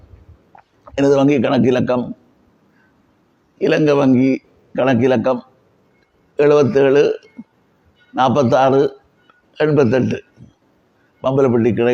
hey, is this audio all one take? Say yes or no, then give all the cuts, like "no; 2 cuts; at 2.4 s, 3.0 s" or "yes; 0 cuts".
yes; 0 cuts